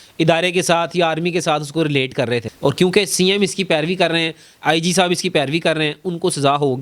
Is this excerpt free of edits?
no; 1 cut; at 2.5 s

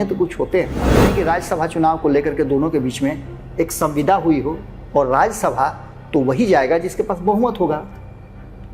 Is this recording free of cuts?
no; 1 cut; at 1.0 s

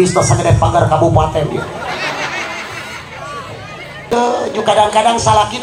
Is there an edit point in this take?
yes; 1 cut; at 4.1 s

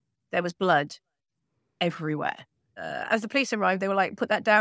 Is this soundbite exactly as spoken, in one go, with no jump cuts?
no; 1 cut; at 2.8 s

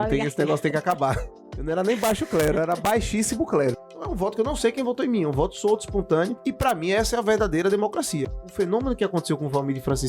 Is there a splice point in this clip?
yes; 3 cuts; at 1.3 s, 3.8 s, 8.3 s

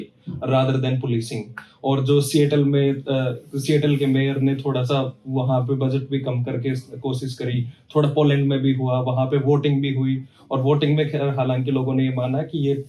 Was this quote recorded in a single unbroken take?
yes; 0 cuts

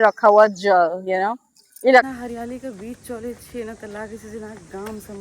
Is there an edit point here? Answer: yes; 1 cut; at 2.1 s

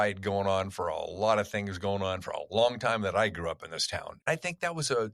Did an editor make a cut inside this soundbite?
yes; 1 cut; at 4.0 s

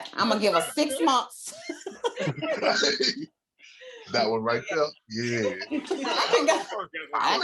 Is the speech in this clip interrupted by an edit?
yes; 1 cut; at 6.0 s

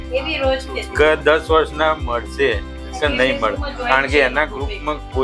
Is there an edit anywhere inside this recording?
no; 0 cuts

